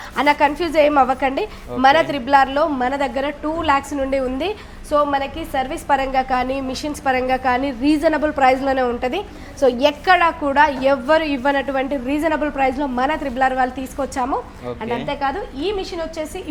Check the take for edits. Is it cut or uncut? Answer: uncut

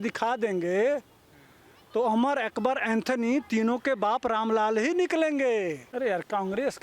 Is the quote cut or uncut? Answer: cut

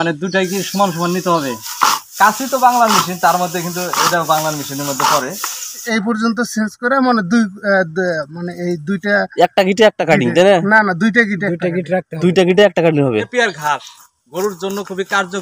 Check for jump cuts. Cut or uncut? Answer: cut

